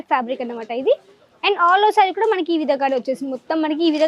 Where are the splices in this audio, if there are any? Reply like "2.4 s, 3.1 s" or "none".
none